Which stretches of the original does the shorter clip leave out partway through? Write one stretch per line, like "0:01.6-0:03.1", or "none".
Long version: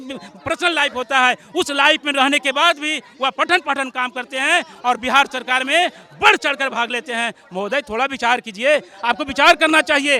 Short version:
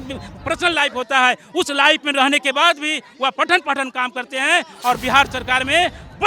none